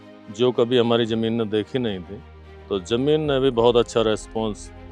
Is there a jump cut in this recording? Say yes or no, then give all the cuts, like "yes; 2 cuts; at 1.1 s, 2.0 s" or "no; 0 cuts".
no; 0 cuts